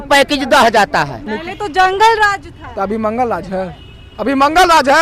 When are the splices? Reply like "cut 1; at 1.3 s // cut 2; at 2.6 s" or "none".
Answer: cut 1; at 1.4 s